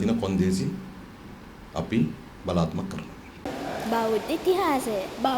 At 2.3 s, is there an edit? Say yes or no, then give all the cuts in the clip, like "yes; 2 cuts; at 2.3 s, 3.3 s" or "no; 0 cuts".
no; 1 cut; at 3.5 s